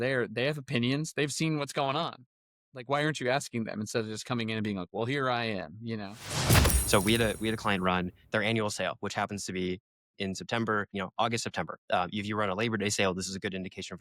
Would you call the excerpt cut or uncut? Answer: cut